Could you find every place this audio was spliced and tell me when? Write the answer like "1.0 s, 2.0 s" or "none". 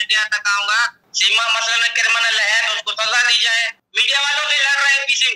1.0 s, 3.9 s